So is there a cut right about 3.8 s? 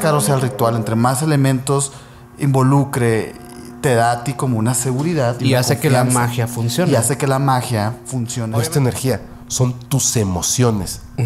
no; 1 cut; at 8.4 s

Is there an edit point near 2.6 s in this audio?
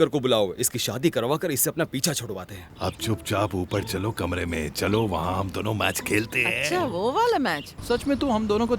yes; 2 cuts; at 2.6 s, 7.7 s

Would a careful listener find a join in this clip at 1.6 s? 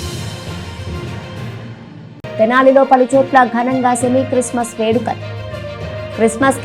yes; 1 cut; at 1.6 s

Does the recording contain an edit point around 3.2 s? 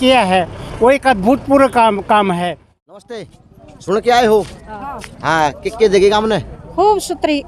yes; 1 cut; at 3.2 s

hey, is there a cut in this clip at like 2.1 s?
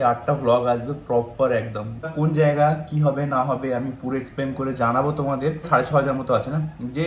yes; 2 cuts; at 2.1 s, 5.6 s

